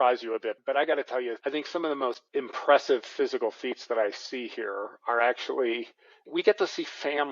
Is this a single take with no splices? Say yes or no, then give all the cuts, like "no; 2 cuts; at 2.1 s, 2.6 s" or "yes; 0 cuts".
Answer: no; 1 cut; at 1.4 s